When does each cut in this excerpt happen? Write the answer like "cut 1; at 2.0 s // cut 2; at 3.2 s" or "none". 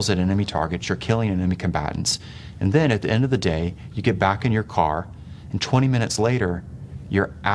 none